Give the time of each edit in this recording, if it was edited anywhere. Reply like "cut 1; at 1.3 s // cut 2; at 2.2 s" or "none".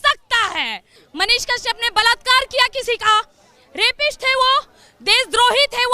cut 1; at 1.0 s